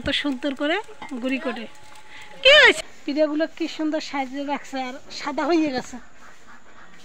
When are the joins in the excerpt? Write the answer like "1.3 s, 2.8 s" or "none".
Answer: 2.8 s